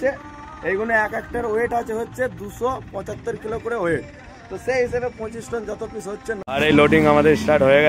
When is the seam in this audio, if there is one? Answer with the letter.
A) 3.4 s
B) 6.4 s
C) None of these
B